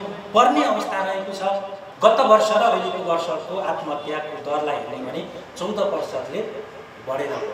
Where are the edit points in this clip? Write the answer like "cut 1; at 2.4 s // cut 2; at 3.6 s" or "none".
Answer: cut 1; at 1.8 s